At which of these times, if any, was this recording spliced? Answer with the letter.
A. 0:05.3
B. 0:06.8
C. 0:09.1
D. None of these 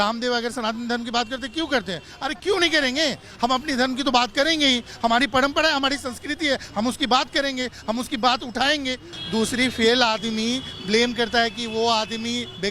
C